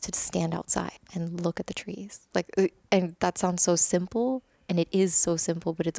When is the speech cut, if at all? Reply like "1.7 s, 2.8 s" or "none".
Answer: 1.0 s